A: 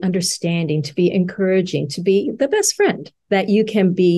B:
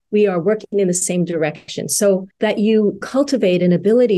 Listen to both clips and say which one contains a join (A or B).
B